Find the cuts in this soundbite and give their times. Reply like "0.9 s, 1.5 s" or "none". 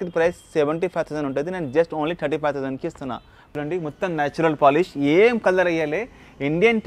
3.4 s